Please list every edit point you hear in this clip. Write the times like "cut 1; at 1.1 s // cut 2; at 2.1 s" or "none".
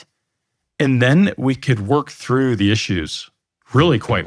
none

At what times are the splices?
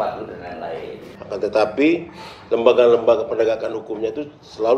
cut 1; at 1.1 s

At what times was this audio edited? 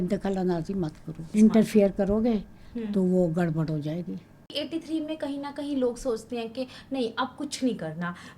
cut 1; at 1.2 s // cut 2; at 4.5 s

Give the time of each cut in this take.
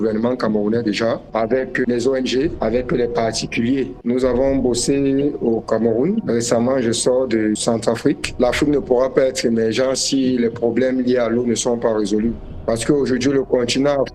cut 1; at 4.0 s // cut 2; at 8.3 s

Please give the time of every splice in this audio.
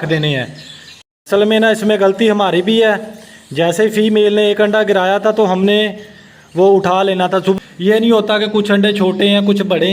cut 1; at 1.0 s // cut 2; at 7.6 s

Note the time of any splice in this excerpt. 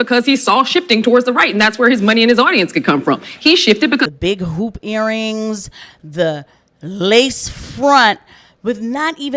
cut 1; at 4.1 s

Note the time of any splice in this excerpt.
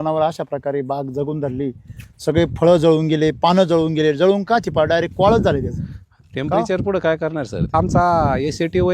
cut 1; at 7.7 s

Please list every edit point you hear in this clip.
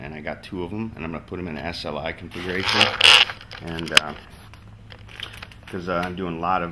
none

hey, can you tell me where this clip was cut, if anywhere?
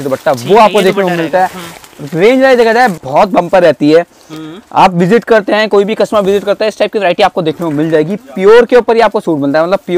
cut 1; at 3.0 s

